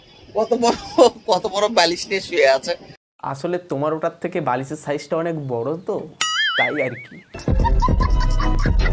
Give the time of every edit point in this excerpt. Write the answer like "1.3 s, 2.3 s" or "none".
none